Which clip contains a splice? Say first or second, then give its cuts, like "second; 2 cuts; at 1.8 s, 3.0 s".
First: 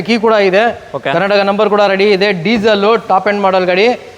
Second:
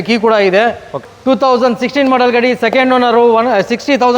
second; 1 cut; at 1.0 s